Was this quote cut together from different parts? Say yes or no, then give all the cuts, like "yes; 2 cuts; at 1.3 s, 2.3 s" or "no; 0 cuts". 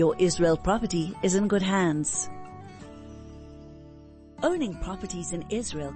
yes; 2 cuts; at 2.1 s, 4.3 s